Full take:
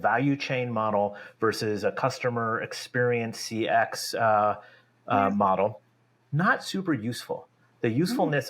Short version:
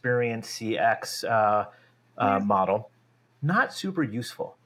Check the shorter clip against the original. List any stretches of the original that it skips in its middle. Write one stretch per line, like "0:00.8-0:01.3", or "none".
none